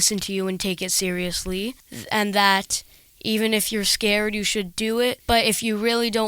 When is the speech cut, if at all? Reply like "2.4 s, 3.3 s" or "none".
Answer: 1.9 s, 5.2 s